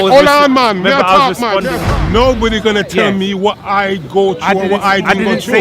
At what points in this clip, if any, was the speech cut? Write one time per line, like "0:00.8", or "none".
0:01.8